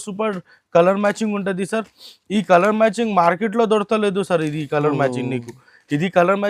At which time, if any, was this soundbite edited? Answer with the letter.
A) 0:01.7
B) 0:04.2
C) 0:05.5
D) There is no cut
D